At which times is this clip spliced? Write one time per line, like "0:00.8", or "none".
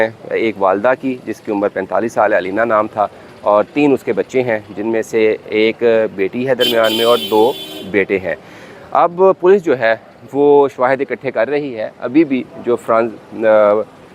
none

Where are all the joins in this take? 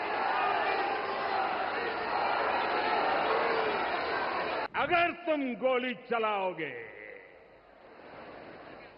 0:04.6

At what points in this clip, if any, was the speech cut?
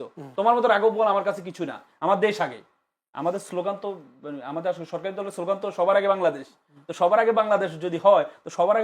none

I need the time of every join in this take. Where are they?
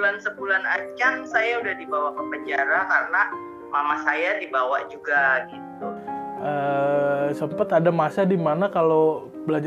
0:06.1

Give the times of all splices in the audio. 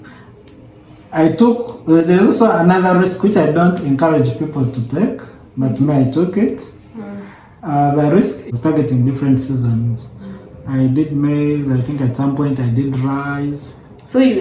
0:08.4

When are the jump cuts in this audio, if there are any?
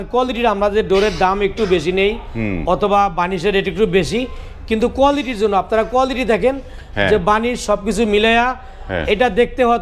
none

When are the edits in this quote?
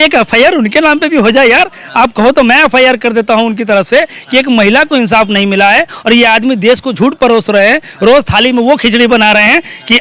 none

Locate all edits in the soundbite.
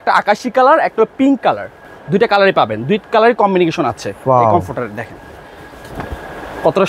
none

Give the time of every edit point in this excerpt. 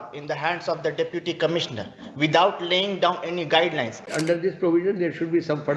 0:04.1

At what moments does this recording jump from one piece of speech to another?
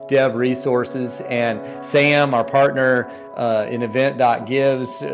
none

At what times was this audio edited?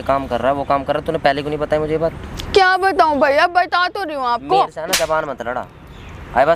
none

